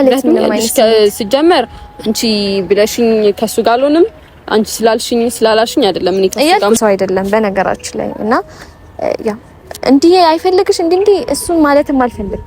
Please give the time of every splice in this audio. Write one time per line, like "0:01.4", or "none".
0:06.8